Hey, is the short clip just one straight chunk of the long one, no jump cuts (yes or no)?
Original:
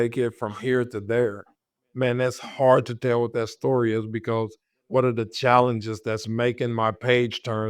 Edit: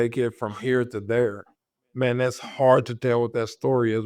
yes